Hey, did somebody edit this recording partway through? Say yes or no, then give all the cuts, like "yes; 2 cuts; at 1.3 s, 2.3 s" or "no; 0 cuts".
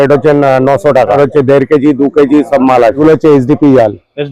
yes; 2 cuts; at 1.1 s, 3.0 s